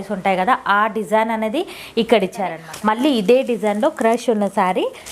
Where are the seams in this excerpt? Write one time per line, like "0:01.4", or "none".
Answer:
0:02.6